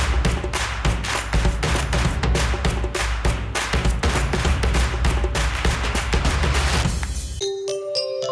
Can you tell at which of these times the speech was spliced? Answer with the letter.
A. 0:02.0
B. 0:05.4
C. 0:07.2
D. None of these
C